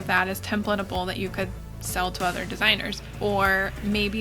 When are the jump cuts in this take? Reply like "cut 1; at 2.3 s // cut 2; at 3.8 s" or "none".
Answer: cut 1; at 3.0 s